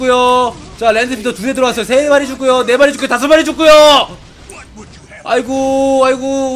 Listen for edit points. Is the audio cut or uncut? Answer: uncut